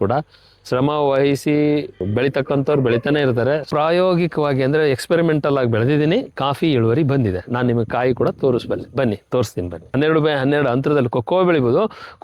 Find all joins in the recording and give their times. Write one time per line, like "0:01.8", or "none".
0:02.0
0:03.7
0:09.9